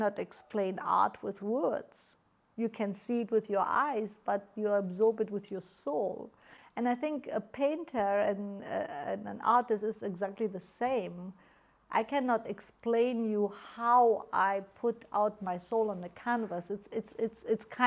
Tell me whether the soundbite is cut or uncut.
uncut